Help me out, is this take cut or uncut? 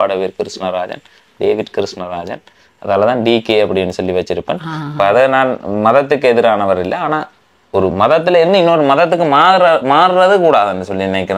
uncut